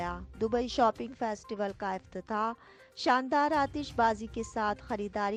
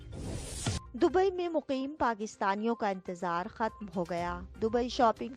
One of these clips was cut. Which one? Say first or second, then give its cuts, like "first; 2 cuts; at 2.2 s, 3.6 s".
second; 1 cut; at 0.9 s